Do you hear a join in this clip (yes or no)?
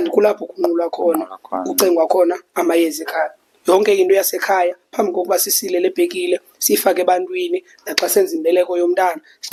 no